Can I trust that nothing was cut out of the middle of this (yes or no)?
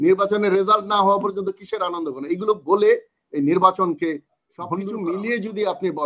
no